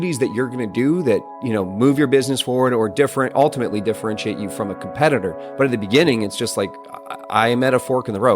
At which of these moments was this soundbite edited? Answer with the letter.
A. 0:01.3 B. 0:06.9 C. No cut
A